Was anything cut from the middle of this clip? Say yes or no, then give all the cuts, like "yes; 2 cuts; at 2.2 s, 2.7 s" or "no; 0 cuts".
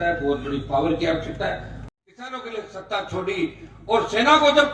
yes; 1 cut; at 1.7 s